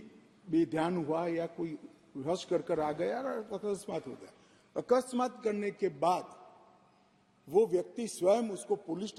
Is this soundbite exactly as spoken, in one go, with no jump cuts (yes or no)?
yes